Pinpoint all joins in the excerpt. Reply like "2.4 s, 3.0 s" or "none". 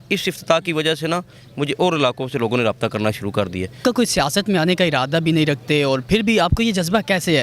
3.8 s